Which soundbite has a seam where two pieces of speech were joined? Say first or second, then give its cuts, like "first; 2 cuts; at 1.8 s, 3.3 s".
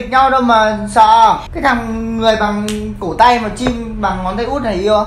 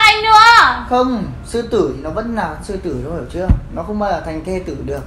first; 1 cut; at 1.5 s